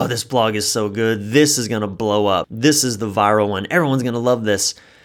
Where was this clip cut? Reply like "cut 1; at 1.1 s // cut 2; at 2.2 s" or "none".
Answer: cut 1; at 2.5 s